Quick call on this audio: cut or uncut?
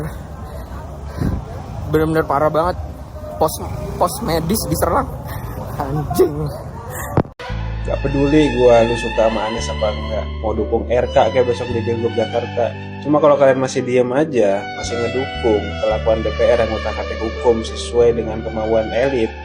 uncut